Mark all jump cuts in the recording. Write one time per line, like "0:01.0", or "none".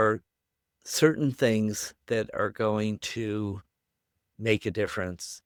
none

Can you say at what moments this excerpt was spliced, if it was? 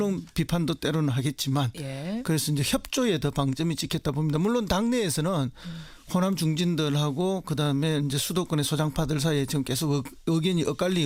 none

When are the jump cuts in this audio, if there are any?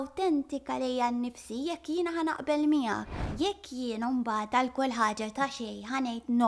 0:03.3

